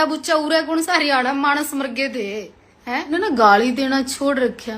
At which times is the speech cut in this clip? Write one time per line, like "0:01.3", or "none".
0:03.1